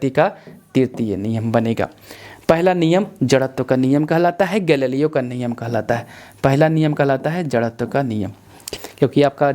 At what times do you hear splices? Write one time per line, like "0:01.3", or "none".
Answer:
0:08.6